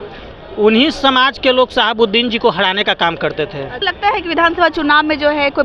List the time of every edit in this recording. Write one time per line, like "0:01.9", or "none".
0:03.8

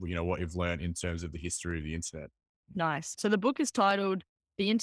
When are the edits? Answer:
0:03.1

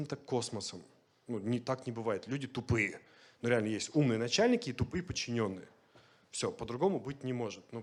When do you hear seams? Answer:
none

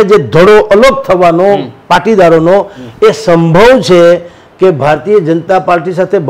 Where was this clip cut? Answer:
none

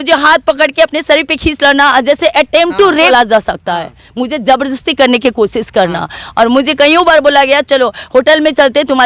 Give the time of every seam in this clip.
0:03.1

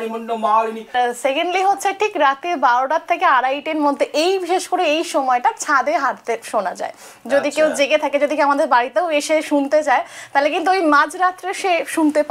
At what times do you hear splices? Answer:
0:00.9

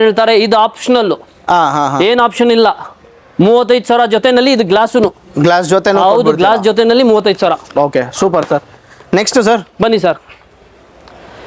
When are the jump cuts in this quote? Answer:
none

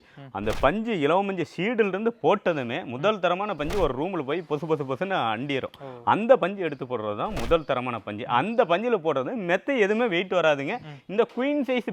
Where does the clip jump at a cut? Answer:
none

